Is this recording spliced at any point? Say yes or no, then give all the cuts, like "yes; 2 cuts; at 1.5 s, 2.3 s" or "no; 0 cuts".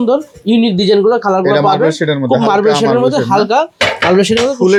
no; 0 cuts